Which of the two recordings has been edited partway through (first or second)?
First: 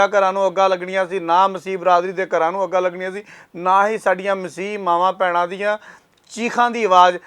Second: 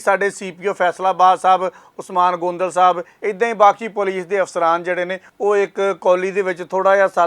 second